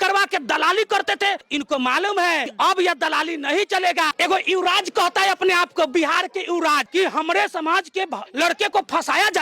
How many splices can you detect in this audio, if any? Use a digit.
4